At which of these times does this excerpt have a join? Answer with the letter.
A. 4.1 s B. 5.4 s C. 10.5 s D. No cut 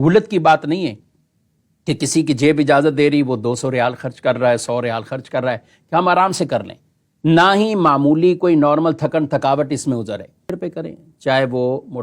C